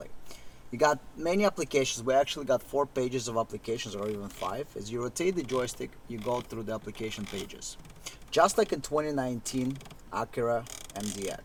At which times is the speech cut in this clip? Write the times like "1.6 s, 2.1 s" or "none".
none